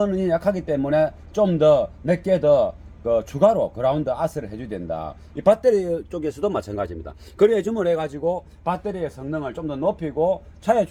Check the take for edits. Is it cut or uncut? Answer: uncut